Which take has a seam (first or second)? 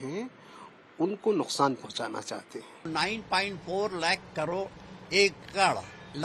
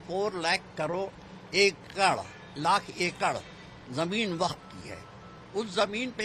first